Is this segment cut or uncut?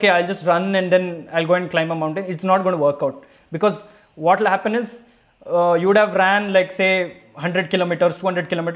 uncut